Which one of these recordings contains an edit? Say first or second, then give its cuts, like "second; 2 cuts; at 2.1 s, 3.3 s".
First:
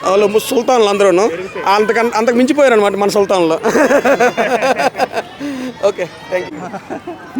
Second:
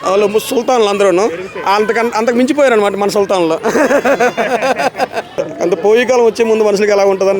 second; 1 cut; at 5.4 s